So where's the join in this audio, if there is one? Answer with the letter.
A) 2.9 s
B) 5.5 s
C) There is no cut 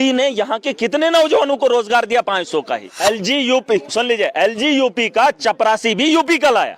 A